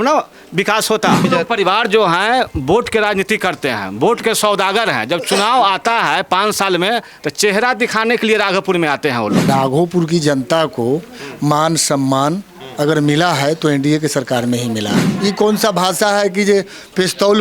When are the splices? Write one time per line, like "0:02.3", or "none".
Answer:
0:01.3
0:09.4
0:15.0